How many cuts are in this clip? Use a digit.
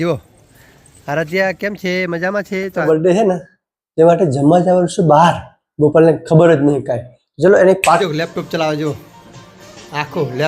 2